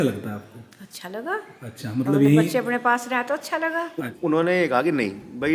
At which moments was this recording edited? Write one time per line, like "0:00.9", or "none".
0:04.1